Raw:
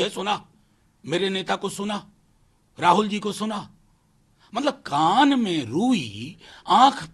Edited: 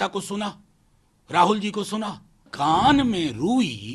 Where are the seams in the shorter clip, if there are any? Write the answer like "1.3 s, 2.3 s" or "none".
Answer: 2.5 s